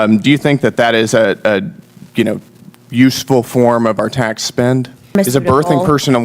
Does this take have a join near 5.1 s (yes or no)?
yes